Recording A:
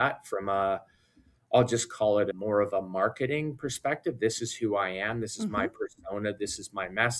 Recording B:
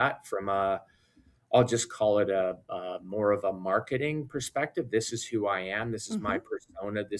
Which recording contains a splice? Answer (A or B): A